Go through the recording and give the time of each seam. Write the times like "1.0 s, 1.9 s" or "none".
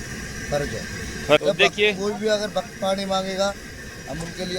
1.4 s